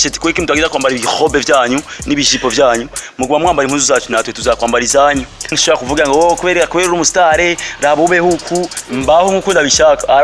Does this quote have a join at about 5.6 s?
yes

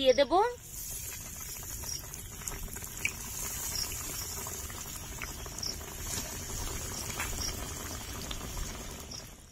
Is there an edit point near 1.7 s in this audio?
no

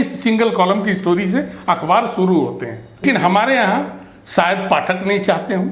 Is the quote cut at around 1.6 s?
no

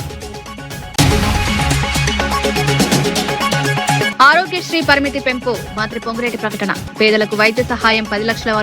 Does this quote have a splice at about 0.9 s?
yes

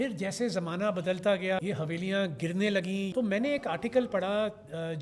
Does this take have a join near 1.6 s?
yes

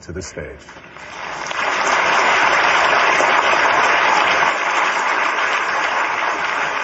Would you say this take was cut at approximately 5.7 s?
no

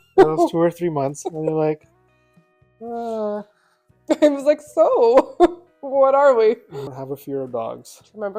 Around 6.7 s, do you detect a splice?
yes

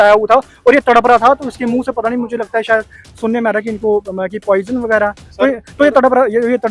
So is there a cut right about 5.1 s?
no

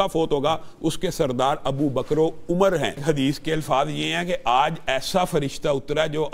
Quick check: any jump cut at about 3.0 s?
yes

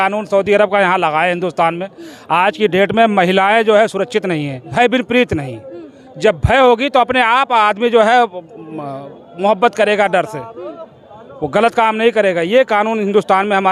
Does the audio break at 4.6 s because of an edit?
yes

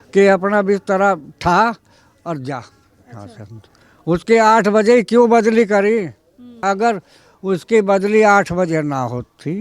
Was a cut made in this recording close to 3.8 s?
no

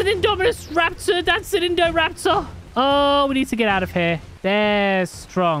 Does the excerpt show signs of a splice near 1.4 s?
no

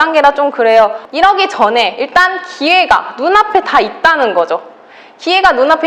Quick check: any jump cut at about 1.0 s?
yes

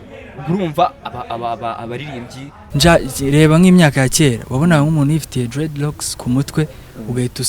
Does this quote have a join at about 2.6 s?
yes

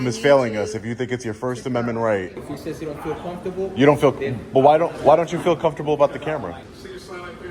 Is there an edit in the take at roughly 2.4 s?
yes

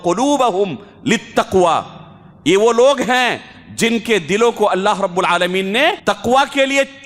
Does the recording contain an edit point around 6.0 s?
yes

